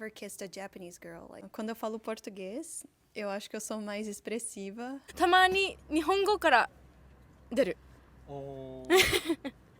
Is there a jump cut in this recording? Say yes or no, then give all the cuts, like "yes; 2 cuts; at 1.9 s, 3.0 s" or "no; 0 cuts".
yes; 2 cuts; at 1.5 s, 5.1 s